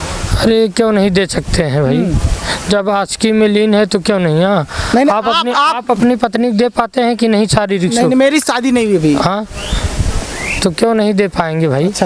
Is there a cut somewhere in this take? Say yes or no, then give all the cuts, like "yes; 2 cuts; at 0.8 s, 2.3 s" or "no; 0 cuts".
no; 0 cuts